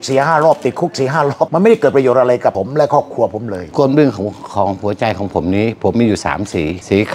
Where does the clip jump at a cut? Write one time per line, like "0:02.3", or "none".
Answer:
0:03.6